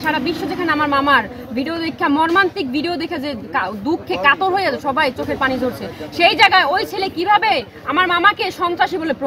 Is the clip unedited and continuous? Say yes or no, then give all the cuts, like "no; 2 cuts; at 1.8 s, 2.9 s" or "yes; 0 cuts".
yes; 0 cuts